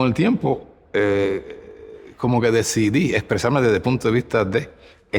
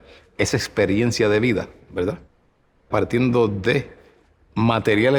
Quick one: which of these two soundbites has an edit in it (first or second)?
second